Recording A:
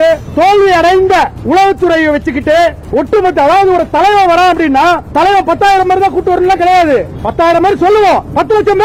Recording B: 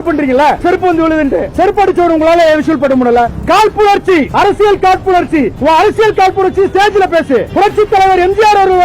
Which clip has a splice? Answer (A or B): B